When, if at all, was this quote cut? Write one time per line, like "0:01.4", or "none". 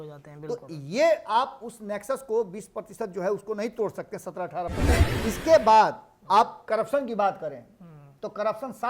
0:05.0